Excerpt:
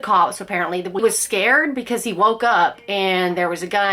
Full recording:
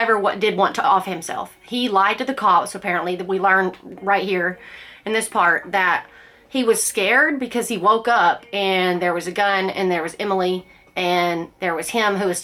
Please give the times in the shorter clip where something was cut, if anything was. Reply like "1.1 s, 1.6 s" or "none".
1.0 s